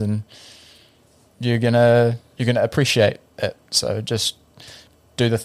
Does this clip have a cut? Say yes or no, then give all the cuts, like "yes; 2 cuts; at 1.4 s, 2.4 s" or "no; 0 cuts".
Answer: no; 0 cuts